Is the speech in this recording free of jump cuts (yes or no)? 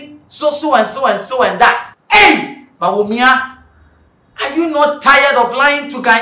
no